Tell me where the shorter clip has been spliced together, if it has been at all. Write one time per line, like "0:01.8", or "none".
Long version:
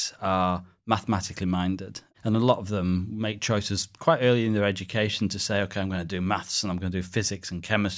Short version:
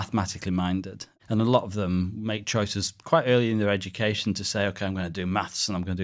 none